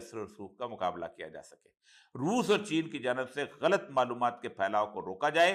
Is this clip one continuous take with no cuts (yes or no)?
yes